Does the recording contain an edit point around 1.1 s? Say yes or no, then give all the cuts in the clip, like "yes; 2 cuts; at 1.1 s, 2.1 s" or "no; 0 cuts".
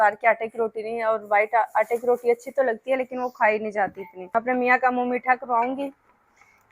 no; 1 cut; at 4.3 s